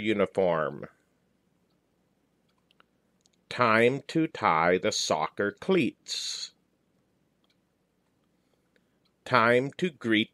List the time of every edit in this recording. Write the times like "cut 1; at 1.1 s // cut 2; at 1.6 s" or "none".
cut 1; at 1.9 s // cut 2; at 7.7 s